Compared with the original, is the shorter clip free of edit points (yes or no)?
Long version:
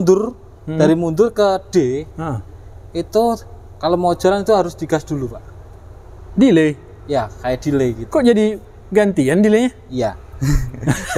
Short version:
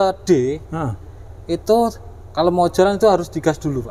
yes